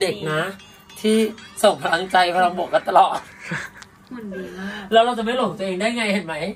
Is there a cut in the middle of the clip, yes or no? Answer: no